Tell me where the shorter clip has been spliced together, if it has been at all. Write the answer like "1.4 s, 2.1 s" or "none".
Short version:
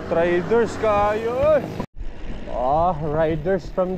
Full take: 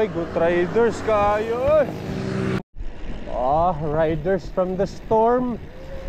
1.9 s